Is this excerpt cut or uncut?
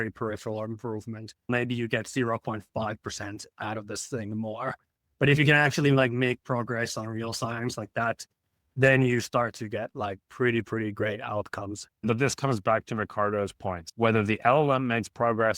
cut